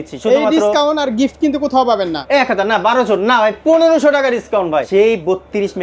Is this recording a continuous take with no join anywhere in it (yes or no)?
no